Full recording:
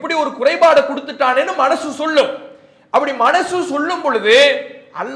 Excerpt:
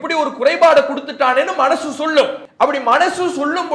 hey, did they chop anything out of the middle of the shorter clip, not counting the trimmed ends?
yes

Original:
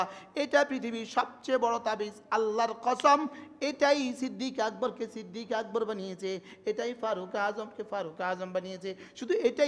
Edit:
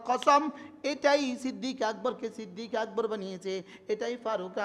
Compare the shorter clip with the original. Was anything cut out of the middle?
no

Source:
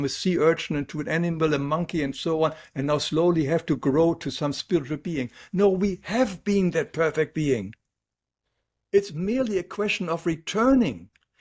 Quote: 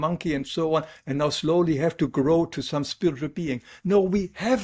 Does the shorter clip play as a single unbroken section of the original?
yes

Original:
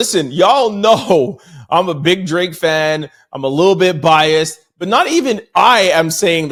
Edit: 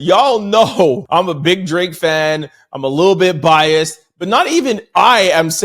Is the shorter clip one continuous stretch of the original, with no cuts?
no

